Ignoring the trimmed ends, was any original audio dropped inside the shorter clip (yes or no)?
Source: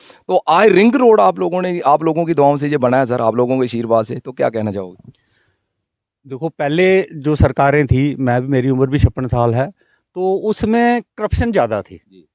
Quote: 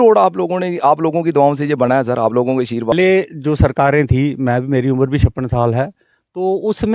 yes